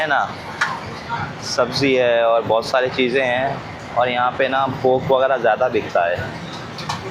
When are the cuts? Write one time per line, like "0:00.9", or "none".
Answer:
none